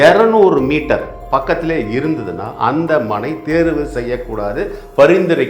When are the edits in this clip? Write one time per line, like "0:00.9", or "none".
0:01.2